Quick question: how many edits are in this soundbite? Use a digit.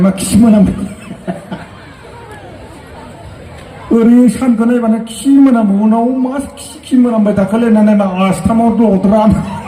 0